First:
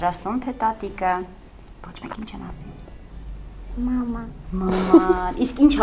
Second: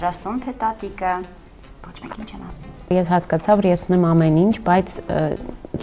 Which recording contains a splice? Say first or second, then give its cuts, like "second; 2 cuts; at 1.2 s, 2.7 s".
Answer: second; 1 cut; at 2.9 s